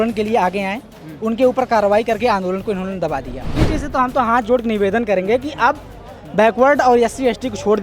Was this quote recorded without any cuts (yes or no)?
no